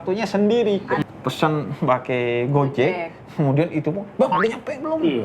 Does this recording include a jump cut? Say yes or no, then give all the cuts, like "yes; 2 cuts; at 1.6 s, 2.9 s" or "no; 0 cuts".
yes; 1 cut; at 1.0 s